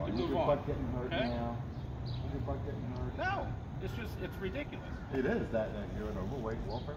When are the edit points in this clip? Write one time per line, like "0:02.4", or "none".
none